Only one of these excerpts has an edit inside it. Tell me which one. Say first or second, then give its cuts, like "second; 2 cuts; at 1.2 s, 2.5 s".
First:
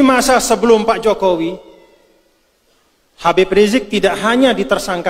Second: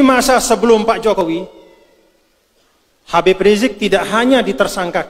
second; 1 cut; at 1.2 s